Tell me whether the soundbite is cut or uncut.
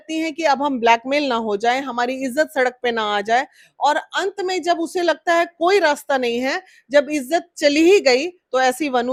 uncut